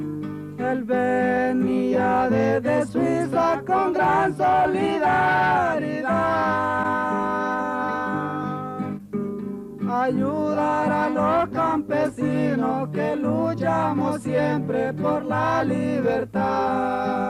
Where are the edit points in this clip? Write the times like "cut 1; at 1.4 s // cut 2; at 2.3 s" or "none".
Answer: cut 1; at 10.2 s